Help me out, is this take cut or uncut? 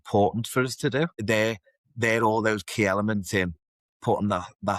cut